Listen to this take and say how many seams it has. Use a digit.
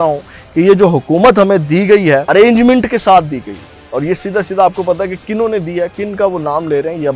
1